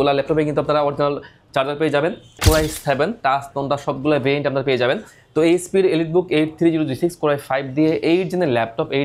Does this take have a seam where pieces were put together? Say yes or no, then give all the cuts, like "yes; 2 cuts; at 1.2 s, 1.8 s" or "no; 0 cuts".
yes; 1 cut; at 2.4 s